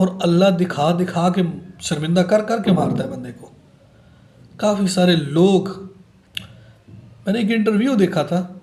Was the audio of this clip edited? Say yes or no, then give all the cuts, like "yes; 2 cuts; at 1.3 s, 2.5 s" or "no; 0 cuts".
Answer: no; 0 cuts